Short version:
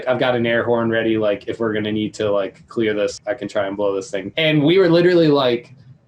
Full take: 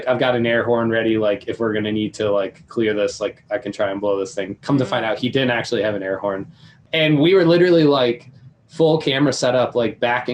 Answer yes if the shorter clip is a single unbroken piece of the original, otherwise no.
no